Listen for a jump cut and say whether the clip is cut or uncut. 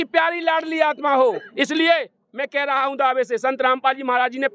cut